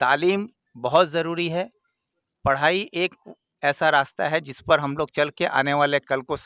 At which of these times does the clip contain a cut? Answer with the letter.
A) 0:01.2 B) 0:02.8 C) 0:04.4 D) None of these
D